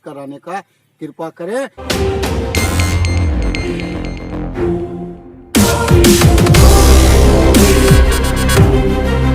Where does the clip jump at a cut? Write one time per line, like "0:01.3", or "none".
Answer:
0:01.8